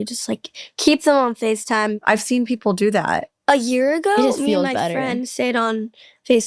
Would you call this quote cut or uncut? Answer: cut